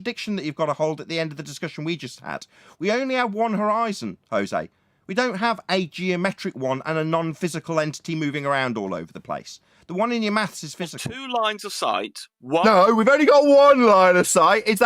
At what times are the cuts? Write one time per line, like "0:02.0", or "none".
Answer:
0:11.1